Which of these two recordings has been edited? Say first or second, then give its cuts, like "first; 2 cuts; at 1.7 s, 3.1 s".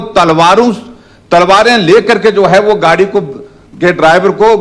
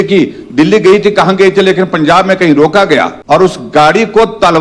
second; 1 cut; at 3.2 s